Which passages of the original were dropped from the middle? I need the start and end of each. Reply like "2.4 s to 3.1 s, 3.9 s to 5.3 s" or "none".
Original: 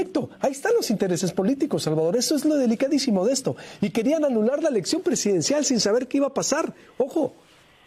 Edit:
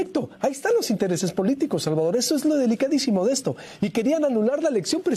none